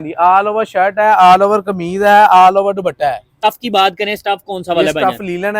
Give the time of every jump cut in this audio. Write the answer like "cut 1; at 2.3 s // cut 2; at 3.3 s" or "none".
cut 1; at 3.3 s